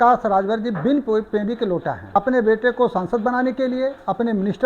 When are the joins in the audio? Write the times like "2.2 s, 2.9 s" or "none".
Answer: 2.0 s